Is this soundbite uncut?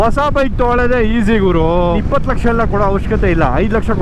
no; 1 cut; at 2.0 s

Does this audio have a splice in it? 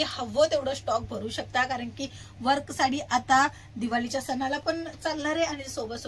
no; 0 cuts

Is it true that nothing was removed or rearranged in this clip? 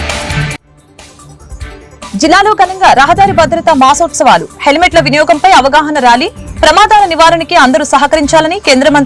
no; 1 cut; at 2.1 s

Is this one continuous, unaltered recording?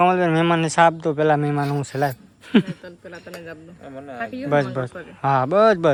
yes; 0 cuts

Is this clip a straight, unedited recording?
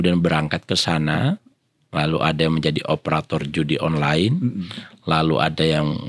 yes; 0 cuts

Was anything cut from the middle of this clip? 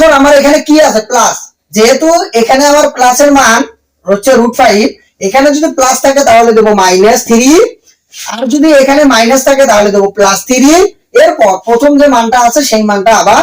no; 0 cuts

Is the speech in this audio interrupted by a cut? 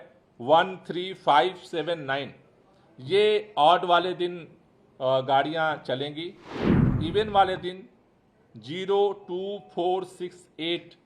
yes; 1 cut; at 6.9 s

